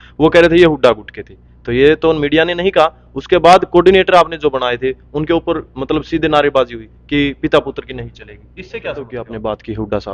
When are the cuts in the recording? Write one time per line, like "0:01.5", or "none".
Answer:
0:09.1